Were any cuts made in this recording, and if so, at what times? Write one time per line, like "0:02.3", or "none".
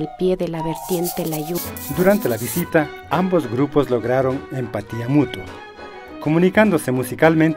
0:01.6